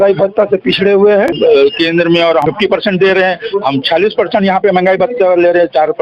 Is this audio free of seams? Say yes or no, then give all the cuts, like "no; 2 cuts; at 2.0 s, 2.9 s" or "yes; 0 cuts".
no; 2 cuts; at 1.3 s, 2.4 s